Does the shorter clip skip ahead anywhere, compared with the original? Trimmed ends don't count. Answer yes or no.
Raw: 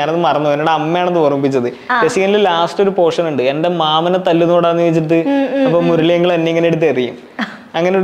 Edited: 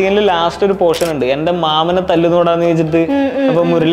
no